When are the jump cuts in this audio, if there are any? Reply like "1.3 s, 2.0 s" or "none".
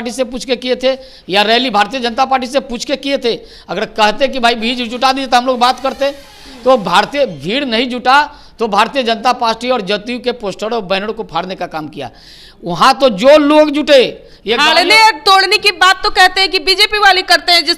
none